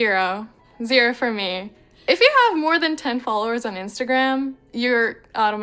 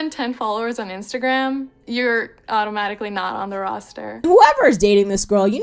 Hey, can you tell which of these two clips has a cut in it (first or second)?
second